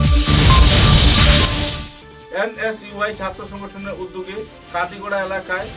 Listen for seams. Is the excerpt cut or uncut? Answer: uncut